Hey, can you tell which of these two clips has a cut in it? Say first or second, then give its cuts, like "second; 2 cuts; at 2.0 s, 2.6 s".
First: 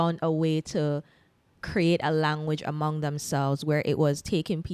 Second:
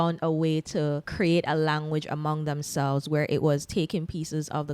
second; 1 cut; at 1.1 s